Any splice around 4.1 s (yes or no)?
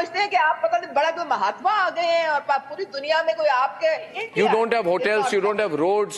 yes